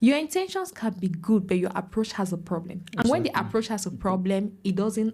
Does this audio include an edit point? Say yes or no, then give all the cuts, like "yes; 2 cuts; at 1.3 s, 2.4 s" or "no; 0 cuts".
no; 0 cuts